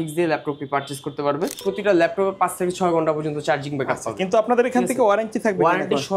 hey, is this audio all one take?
no; 1 cut; at 1.6 s

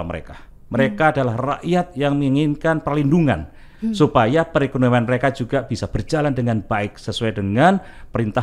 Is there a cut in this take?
no; 0 cuts

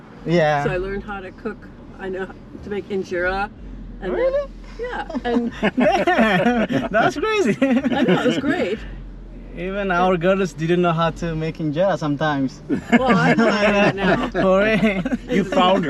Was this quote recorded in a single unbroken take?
yes; 0 cuts

